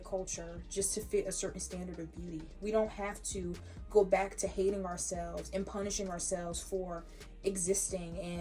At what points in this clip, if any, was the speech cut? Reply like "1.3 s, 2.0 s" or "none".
none